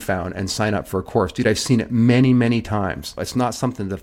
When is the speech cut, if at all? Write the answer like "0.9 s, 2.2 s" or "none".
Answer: 3.1 s